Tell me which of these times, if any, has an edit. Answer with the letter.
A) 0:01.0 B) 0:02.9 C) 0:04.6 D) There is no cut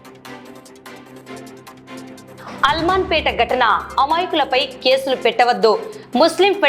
A